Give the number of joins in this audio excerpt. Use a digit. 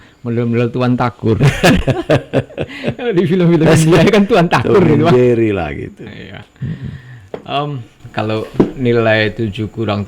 0